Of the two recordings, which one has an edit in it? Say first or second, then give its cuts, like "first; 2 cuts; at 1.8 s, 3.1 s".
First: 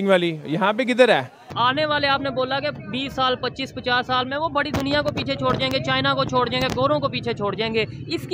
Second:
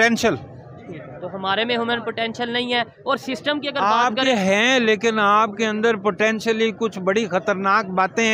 first; 1 cut; at 1.5 s